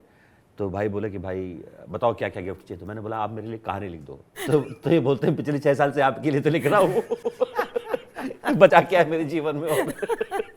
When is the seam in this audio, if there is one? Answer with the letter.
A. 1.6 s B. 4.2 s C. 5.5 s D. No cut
D